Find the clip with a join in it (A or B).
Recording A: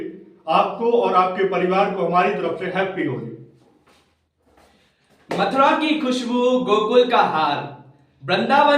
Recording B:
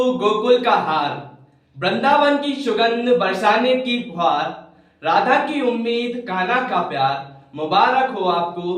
A